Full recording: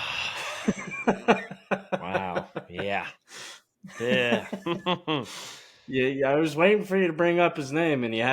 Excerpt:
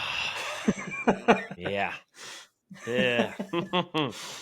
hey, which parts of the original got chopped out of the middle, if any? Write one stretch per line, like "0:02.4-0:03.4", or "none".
0:01.5-0:02.7